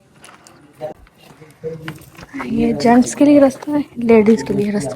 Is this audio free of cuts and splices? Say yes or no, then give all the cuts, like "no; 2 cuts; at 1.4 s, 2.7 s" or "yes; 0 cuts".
no; 1 cut; at 0.9 s